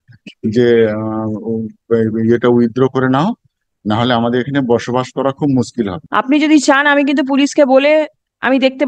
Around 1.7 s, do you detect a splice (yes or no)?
no